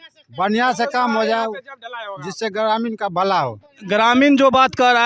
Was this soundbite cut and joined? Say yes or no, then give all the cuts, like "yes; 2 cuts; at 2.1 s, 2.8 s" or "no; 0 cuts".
no; 0 cuts